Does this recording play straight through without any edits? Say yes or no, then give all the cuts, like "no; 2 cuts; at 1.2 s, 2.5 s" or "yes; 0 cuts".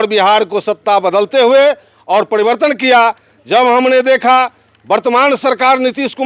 yes; 0 cuts